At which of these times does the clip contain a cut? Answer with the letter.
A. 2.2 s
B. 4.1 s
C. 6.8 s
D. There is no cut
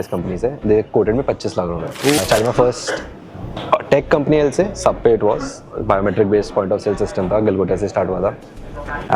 A